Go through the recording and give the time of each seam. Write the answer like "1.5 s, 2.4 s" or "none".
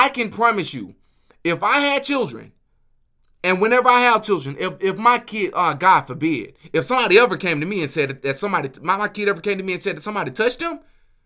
none